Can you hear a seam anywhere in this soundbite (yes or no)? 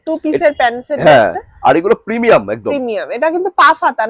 no